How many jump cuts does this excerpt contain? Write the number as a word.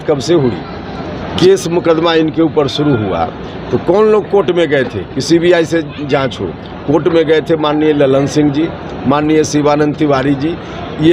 one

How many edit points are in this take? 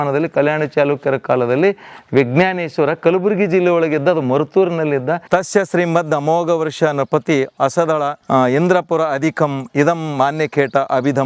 two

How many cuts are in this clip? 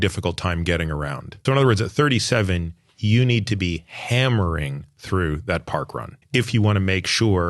two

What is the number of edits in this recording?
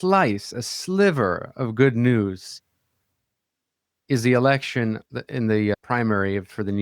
one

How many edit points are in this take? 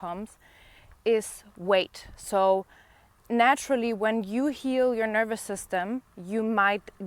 zero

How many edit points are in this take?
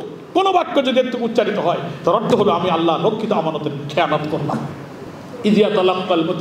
zero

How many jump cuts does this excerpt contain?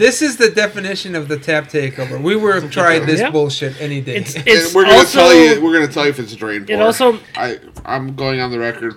one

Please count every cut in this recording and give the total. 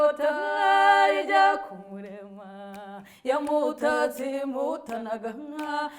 zero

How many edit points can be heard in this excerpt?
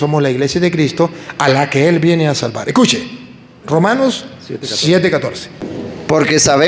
one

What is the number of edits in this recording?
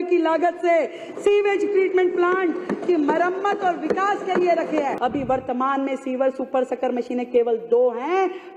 one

